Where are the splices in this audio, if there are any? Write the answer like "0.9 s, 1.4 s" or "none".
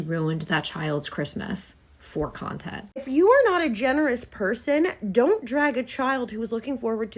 2.9 s